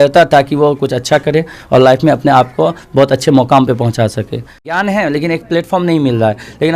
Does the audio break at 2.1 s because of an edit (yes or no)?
no